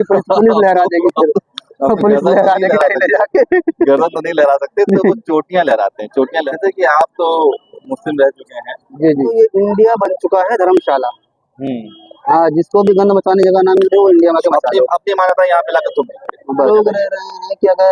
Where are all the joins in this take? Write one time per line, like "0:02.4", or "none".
0:06.4
0:09.3
0:16.7

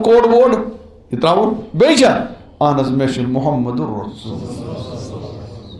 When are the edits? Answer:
none

